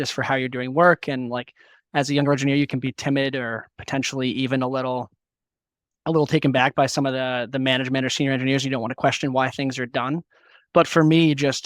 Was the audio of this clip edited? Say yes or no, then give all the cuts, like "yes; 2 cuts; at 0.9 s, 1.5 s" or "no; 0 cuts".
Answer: no; 0 cuts